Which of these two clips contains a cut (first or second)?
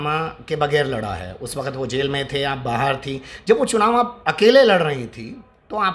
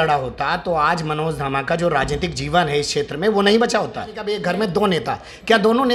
second